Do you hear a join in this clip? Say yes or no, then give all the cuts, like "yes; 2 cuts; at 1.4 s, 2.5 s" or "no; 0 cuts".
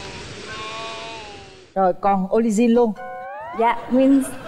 no; 0 cuts